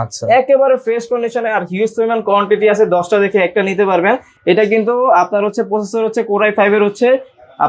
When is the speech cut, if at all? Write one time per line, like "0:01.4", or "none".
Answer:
none